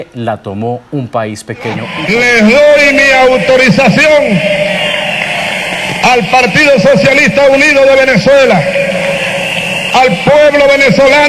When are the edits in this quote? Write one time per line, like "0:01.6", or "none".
0:02.0